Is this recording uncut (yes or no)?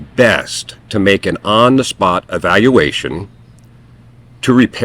no